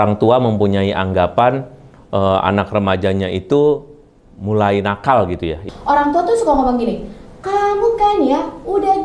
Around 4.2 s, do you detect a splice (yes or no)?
no